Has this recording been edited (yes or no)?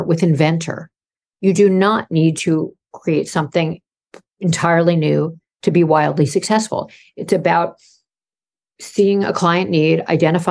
no